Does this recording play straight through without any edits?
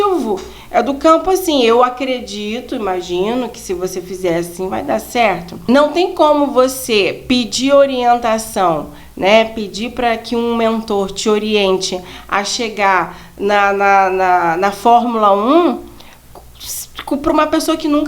no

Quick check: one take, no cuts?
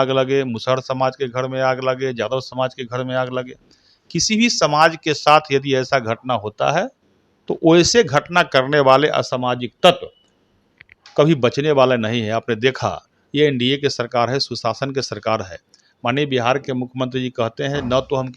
yes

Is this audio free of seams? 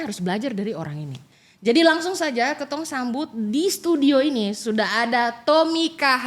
yes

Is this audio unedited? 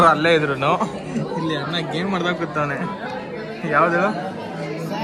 yes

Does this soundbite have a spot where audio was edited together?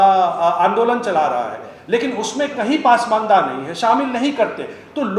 no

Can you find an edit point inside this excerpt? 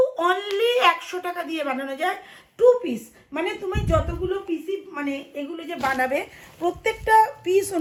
no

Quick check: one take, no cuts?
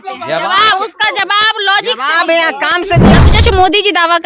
no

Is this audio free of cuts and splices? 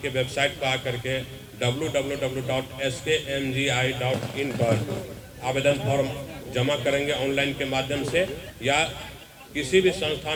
yes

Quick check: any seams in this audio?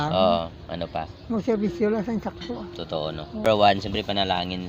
yes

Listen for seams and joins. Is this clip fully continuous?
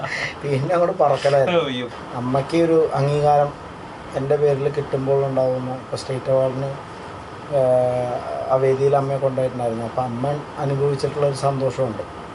no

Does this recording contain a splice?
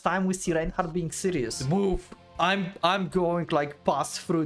yes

